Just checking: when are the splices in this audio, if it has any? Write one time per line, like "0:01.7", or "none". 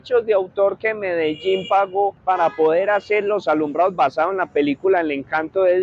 none